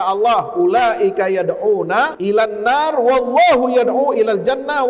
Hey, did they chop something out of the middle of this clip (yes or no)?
yes